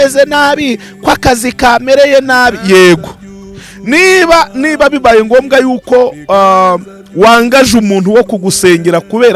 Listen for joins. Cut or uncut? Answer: uncut